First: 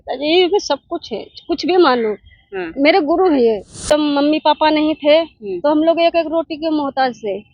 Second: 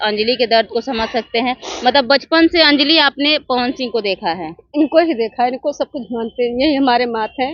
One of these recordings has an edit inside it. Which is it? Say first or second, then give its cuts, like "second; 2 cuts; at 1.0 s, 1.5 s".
first; 1 cut; at 3.8 s